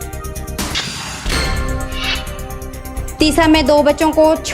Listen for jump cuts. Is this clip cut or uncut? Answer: cut